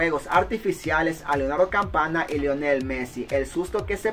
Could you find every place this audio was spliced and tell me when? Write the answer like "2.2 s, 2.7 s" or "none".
none